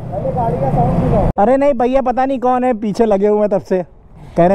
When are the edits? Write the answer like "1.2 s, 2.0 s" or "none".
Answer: 1.3 s

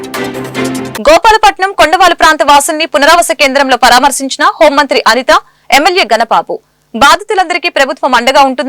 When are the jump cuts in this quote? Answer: 0.9 s

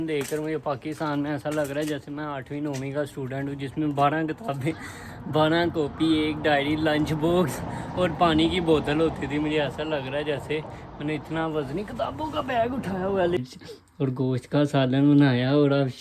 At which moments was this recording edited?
13.4 s

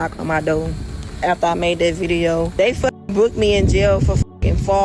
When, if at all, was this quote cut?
2.5 s

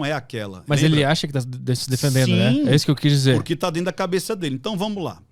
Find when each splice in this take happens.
none

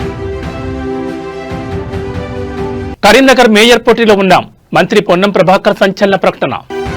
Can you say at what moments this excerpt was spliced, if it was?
none

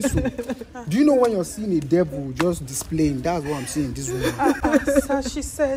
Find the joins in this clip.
none

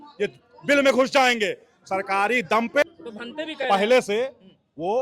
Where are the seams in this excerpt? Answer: 2.8 s

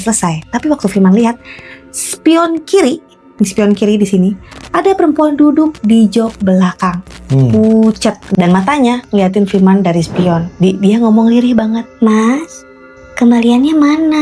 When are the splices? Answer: 8.3 s, 10.5 s, 11.9 s

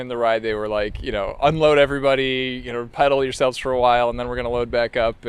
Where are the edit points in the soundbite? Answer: none

